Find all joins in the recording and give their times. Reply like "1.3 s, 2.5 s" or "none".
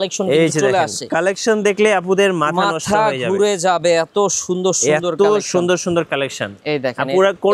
none